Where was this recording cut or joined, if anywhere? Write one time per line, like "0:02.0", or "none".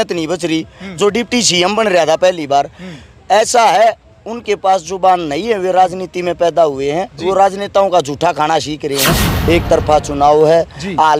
0:09.3

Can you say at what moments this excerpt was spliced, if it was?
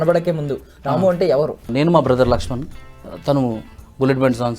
0:01.7

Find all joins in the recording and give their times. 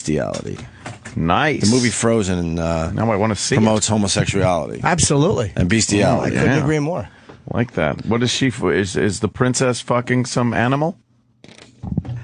none

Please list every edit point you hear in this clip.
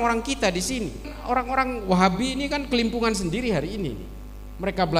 0:01.1

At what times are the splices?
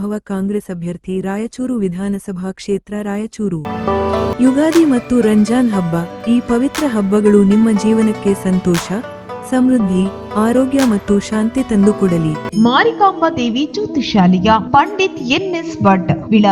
0:03.6
0:12.5

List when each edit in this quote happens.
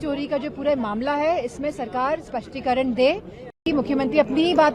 0:03.6

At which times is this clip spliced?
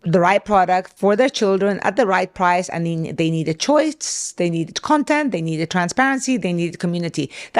0:00.9

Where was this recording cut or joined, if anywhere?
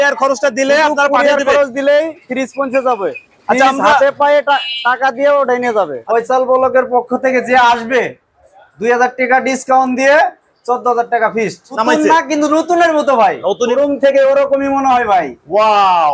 0:06.0
0:11.8
0:13.7

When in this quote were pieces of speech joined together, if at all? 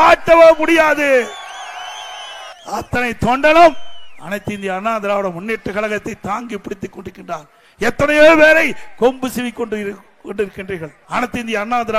0:02.5
0:10.9

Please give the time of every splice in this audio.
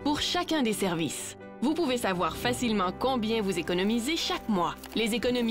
0:01.0

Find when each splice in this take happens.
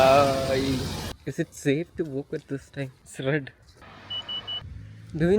0:01.1
0:03.0
0:03.7
0:04.7

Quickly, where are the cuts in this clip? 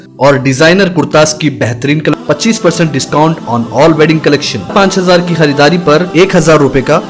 0:02.1
0:04.7

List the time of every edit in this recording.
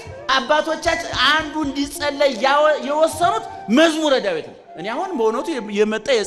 none

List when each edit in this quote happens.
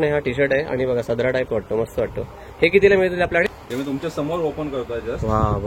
0:03.5

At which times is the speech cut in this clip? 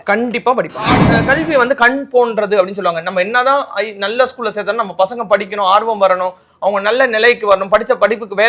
0:01.2

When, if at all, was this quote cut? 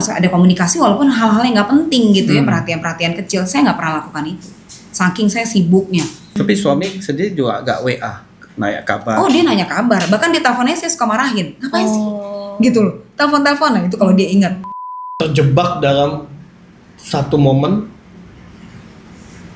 0:06.3
0:15.1

